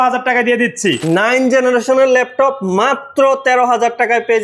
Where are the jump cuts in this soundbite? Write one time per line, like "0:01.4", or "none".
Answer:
0:01.0